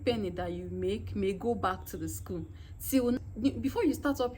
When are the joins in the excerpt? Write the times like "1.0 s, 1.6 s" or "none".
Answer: 3.2 s